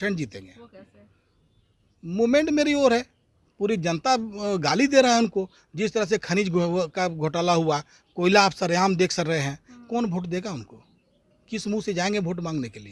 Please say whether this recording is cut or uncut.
uncut